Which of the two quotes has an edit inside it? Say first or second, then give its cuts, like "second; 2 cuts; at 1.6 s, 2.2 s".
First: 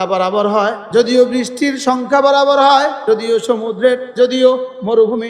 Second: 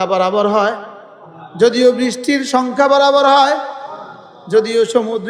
first; 3 cuts; at 0.8 s, 3.0 s, 4.1 s